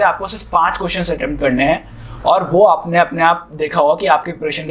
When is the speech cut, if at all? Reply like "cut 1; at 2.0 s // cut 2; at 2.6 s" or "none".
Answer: none